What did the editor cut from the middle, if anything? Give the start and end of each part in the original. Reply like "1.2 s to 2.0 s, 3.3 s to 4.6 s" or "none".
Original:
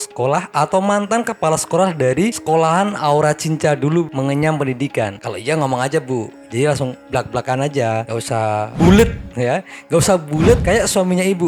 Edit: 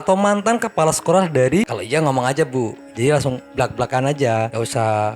2.4 s to 5.3 s